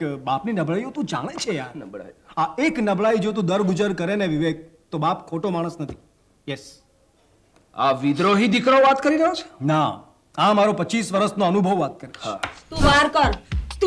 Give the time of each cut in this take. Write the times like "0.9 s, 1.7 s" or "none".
12.6 s